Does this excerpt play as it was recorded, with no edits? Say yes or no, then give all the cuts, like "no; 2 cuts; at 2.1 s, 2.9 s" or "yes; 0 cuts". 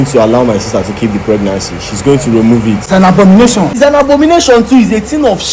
no; 2 cuts; at 2.8 s, 3.8 s